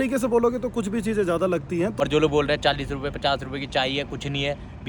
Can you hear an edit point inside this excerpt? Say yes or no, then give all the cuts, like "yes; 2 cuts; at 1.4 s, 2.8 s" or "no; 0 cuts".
yes; 1 cut; at 2.0 s